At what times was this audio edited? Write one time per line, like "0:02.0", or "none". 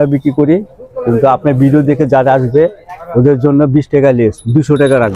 none